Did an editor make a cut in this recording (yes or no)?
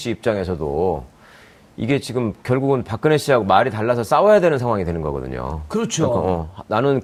no